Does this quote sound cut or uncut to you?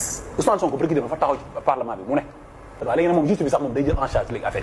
cut